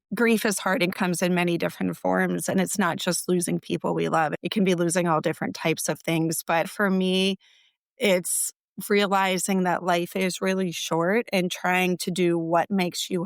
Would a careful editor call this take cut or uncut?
cut